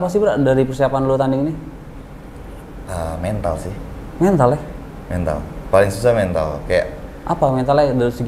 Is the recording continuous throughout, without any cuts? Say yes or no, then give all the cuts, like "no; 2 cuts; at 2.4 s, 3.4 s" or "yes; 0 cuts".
yes; 0 cuts